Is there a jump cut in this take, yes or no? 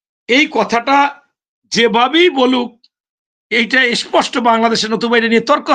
no